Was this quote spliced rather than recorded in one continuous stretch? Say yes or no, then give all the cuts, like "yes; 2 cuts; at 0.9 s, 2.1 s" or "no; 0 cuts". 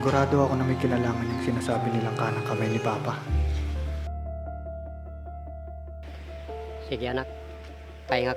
no; 0 cuts